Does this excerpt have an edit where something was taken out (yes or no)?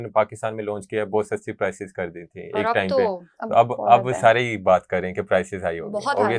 no